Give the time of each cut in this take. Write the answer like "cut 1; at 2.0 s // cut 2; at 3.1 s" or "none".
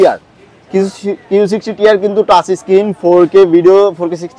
none